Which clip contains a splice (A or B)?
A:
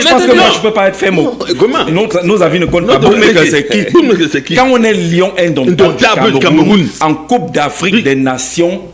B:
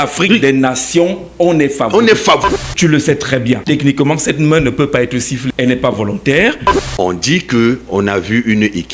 B